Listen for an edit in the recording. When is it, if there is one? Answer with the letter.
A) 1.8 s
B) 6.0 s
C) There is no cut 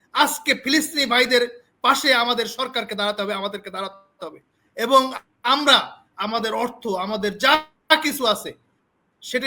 C